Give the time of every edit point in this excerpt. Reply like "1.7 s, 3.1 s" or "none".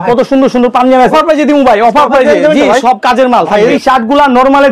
1.1 s, 3.8 s